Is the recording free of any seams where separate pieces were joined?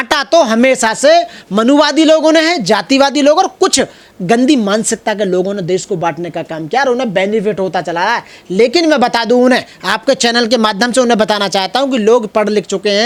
yes; 0 cuts

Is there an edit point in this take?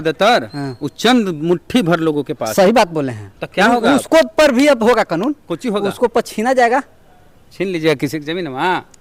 no; 0 cuts

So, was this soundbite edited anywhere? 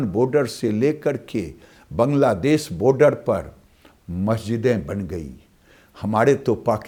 no; 0 cuts

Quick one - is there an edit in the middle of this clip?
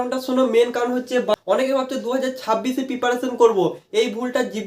yes; 1 cut; at 1.4 s

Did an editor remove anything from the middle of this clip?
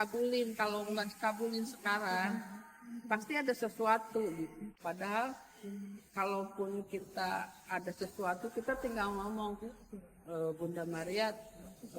yes; 1 cut; at 4.7 s

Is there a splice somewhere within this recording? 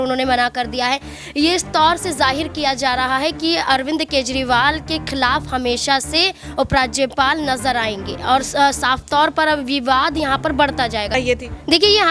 yes; 1 cut; at 11.1 s

